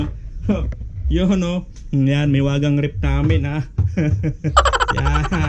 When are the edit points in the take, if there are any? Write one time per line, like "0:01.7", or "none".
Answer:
0:04.3